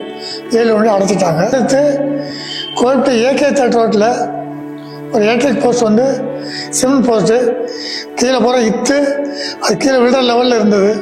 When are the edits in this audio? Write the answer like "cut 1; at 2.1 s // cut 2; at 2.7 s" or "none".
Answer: cut 1; at 1.5 s